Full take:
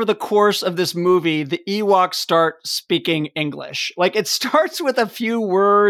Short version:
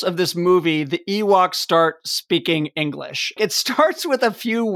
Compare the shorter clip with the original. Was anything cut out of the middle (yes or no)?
yes